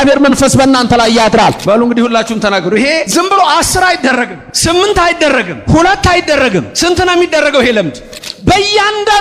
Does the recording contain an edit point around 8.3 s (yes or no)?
yes